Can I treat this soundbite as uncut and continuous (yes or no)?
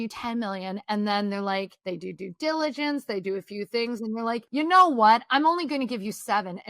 no